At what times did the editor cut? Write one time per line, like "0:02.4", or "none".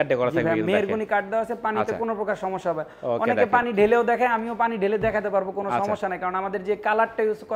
none